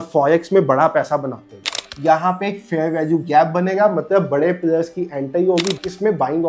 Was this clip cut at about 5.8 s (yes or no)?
yes